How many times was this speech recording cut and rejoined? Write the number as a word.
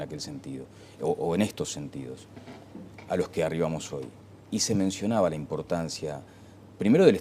one